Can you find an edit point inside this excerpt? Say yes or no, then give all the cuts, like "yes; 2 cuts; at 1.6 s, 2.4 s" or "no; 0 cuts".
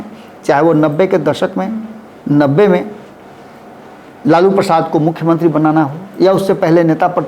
no; 0 cuts